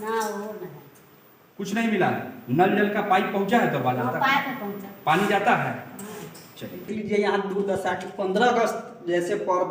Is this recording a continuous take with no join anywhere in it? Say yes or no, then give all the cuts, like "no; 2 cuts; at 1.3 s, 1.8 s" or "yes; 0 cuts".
no; 1 cut; at 6.9 s